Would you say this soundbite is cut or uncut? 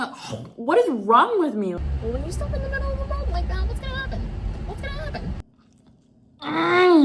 cut